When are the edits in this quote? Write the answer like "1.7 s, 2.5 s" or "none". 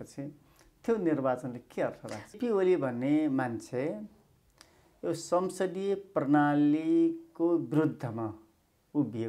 2.3 s